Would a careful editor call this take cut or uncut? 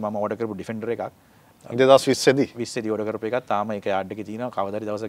uncut